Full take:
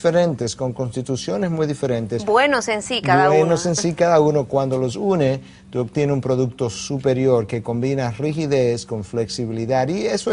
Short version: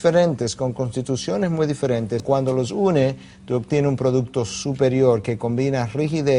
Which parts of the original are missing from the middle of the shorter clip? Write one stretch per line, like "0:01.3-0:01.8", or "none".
0:02.2-0:04.5

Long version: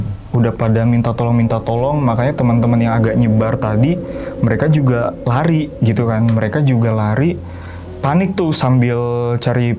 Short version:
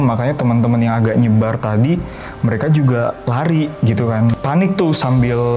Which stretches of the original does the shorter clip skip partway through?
0:06.4-0:08.0

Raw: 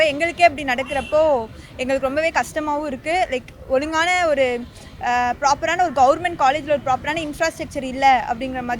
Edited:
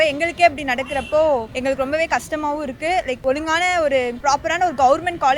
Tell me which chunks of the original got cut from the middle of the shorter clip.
0:01.5-0:01.8
0:03.4-0:03.6
0:04.6-0:05.4

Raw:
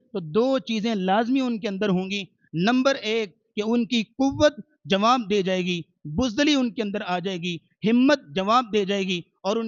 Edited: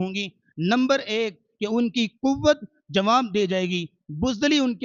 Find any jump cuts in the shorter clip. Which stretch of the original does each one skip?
none

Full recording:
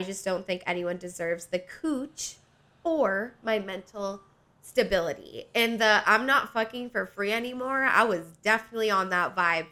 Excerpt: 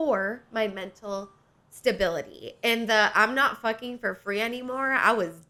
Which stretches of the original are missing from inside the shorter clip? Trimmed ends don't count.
none

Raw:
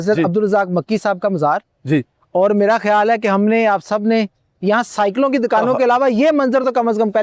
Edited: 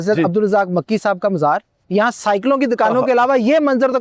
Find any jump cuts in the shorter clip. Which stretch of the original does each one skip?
0:01.7-0:04.4

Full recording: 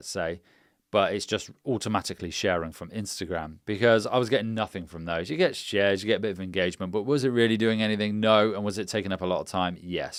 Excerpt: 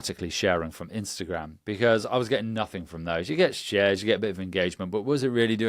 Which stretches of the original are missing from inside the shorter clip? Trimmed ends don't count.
none

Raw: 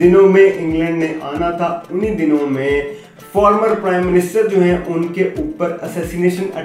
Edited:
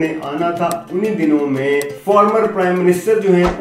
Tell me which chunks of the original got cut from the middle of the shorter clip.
0:02.9-0:03.2

